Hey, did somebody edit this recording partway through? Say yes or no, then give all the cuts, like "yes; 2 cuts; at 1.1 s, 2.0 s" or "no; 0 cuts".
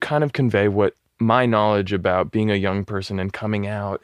yes; 1 cut; at 1.1 s